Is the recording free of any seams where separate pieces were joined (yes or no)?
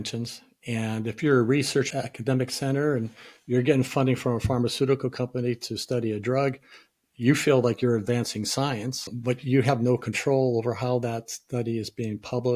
no